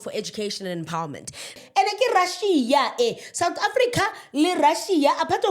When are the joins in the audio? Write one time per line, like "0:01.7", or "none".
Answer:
0:01.6